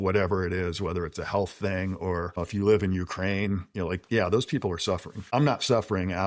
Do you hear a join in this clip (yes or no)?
yes